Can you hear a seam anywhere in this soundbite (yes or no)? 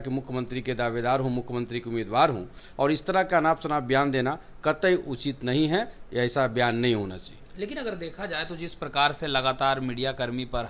no